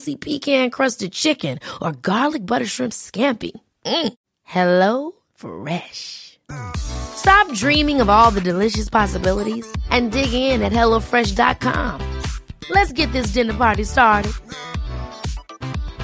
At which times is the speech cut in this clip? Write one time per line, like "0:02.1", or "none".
none